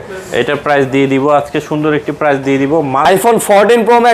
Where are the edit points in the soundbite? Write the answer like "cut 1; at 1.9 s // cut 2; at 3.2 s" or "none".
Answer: cut 1; at 3.0 s